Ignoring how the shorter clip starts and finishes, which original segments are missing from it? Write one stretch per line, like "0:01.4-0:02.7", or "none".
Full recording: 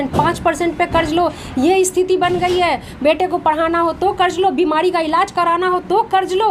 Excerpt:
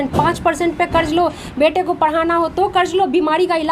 0:01.4-0:02.9

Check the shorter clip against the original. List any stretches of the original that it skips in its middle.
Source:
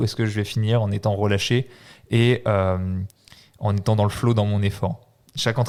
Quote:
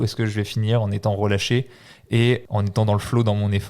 0:02.4-0:03.5

